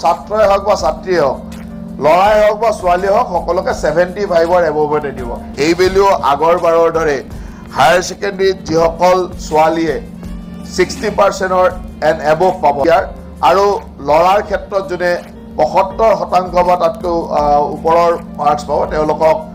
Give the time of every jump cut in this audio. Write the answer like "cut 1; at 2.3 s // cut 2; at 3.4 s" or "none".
cut 1; at 5.5 s // cut 2; at 12.8 s

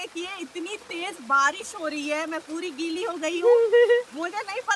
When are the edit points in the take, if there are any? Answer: none

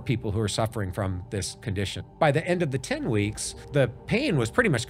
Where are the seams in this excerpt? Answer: cut 1; at 1.9 s // cut 2; at 3.6 s

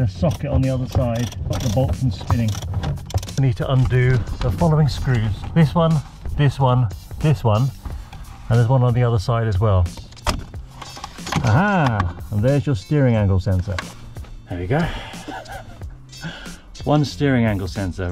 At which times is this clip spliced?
cut 1; at 1.4 s // cut 2; at 3.4 s // cut 3; at 5.4 s // cut 4; at 10.0 s // cut 5; at 14.0 s

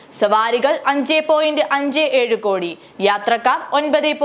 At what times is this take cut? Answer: none

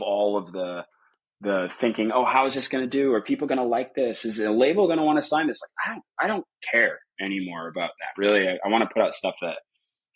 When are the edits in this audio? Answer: none

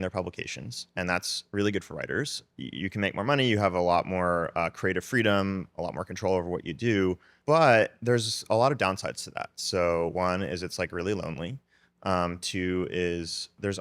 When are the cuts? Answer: cut 1; at 2.4 s // cut 2; at 7.3 s

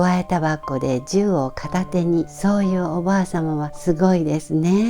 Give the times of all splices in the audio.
cut 1; at 2.3 s // cut 2; at 3.7 s

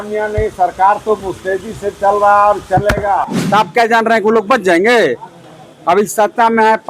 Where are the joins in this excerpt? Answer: cut 1; at 3.3 s

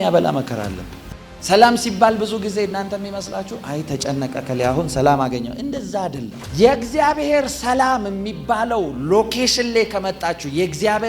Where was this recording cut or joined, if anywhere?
cut 1; at 1.0 s

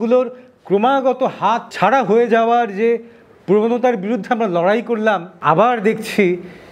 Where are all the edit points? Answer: cut 1; at 1.7 s

